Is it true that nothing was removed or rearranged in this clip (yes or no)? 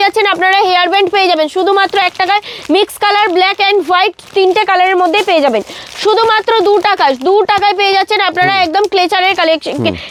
yes